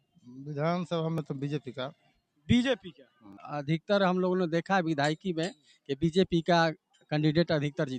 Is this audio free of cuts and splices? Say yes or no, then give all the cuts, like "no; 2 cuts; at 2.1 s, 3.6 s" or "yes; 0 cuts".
no; 1 cut; at 3.4 s